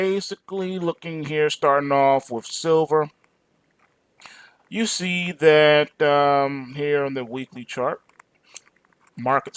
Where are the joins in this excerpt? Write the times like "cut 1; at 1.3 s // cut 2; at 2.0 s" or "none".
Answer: cut 1; at 1.1 s